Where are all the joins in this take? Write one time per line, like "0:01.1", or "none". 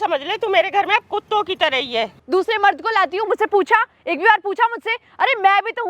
0:02.2

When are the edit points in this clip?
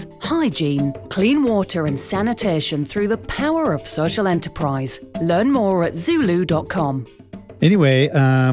0:07.5

